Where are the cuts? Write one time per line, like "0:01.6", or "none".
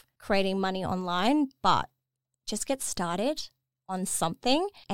none